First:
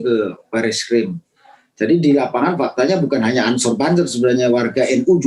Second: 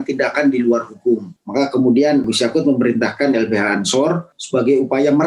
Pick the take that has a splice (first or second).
second